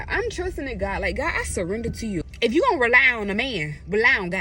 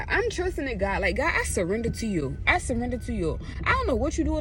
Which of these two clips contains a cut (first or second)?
first